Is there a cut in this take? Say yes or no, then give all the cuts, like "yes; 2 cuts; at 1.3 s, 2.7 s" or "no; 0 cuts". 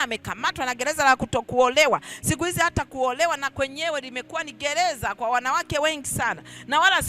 no; 0 cuts